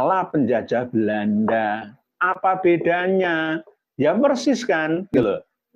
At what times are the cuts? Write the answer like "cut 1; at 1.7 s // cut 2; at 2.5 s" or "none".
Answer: none